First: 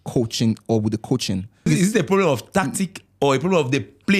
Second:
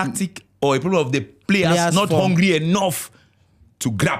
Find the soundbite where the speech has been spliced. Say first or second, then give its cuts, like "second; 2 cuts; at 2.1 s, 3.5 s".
first; 1 cut; at 1.7 s